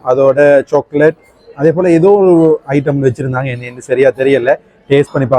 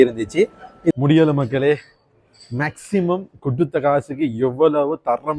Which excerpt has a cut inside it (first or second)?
second